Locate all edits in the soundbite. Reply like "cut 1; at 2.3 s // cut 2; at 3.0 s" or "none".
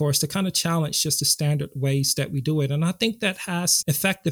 none